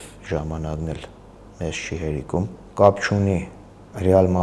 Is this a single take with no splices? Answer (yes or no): no